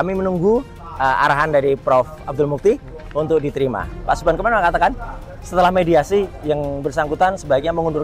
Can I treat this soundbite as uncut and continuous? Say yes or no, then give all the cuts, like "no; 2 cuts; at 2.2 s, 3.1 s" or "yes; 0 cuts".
no; 1 cut; at 3.9 s